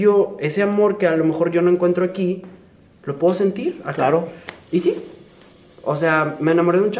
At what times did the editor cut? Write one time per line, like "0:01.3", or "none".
none